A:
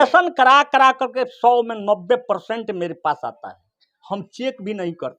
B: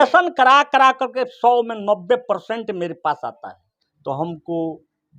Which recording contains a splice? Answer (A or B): B